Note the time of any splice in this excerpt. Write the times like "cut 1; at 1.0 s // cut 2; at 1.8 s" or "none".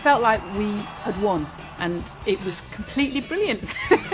cut 1; at 0.9 s